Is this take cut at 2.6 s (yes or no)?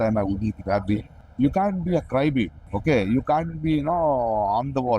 yes